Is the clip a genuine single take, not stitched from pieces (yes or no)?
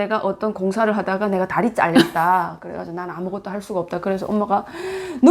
yes